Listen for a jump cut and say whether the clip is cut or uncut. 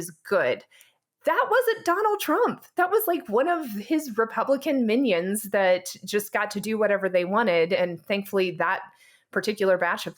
uncut